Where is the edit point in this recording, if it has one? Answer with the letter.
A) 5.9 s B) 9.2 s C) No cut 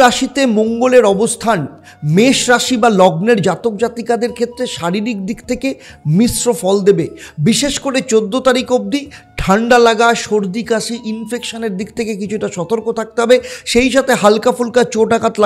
C